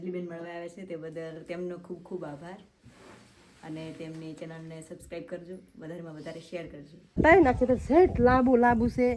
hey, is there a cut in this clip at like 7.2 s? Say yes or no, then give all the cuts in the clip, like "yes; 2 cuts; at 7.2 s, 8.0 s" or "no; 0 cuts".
yes; 1 cut; at 7.2 s